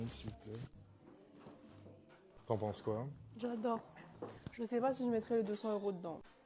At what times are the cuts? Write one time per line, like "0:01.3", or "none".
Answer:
0:03.5